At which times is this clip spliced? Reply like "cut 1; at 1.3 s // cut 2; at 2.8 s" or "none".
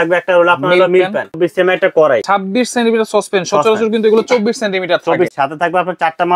cut 1; at 1.4 s // cut 2; at 2.2 s // cut 3; at 5.3 s